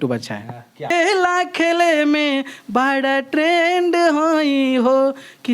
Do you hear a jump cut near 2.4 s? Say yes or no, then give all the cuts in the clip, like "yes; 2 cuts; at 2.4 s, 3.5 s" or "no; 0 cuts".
no; 1 cut; at 0.9 s